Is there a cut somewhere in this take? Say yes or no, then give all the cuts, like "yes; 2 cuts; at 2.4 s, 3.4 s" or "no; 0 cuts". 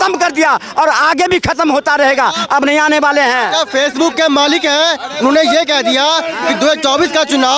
no; 0 cuts